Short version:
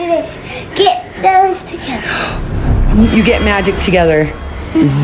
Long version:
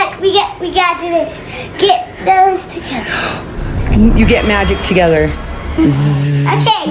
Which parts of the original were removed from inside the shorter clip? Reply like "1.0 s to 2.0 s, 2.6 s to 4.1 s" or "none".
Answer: none